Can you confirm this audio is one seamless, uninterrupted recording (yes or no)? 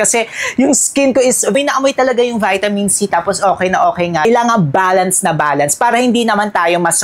no